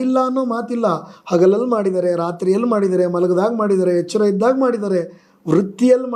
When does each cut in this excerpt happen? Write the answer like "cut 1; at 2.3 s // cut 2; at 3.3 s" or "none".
none